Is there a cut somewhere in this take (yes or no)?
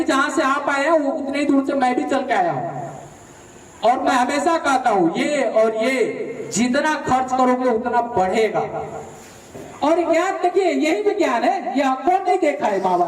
yes